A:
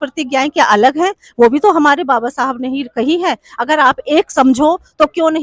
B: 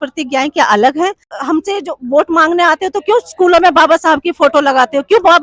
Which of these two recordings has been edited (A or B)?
B